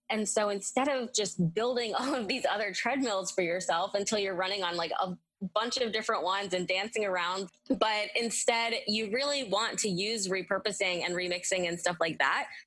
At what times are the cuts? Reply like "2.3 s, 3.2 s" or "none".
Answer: 7.4 s